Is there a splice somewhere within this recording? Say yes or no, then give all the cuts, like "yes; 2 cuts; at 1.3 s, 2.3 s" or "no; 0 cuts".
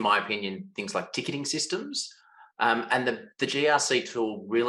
no; 0 cuts